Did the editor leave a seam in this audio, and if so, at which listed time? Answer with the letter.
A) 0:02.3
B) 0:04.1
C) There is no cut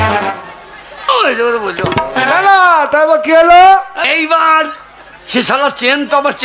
B